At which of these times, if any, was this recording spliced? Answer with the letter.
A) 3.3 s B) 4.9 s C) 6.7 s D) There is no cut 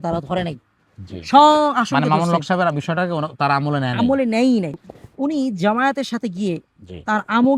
B